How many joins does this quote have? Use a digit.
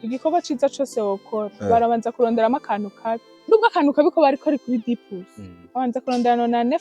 1